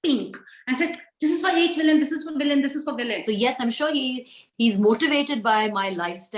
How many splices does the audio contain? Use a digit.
1